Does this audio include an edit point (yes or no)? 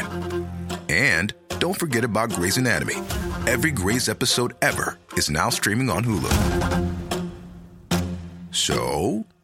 no